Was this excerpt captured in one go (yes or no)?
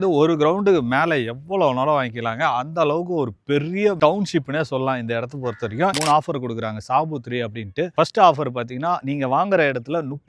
no